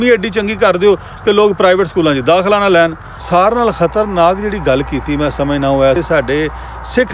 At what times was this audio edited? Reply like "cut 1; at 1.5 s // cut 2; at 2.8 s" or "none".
cut 1; at 3.2 s // cut 2; at 6.0 s

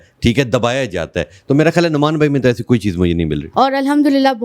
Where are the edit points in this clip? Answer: cut 1; at 3.4 s

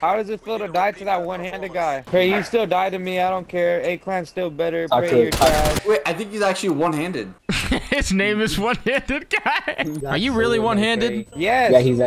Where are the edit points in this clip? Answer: cut 1; at 2.0 s // cut 2; at 5.8 s // cut 3; at 10.0 s

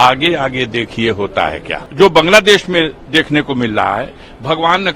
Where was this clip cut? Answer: cut 1; at 1.8 s

